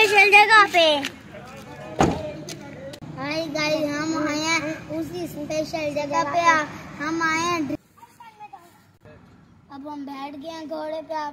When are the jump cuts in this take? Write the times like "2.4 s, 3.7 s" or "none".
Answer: 3.0 s, 7.8 s